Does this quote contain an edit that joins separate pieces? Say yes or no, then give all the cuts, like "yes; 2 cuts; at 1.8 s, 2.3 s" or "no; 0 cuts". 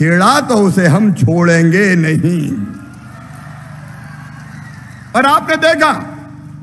no; 0 cuts